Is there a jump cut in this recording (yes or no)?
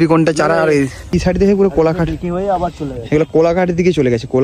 yes